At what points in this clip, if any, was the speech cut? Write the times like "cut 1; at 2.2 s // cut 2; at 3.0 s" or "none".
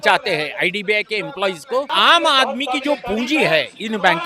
cut 1; at 1.9 s